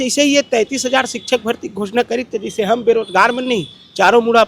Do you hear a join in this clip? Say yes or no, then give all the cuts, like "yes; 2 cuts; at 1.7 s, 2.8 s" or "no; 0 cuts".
no; 0 cuts